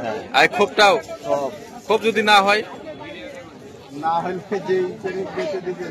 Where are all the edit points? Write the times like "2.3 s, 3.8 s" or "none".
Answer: none